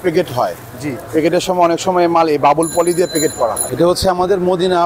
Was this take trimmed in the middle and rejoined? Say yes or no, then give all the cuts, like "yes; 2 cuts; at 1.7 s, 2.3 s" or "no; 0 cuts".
yes; 1 cut; at 3.6 s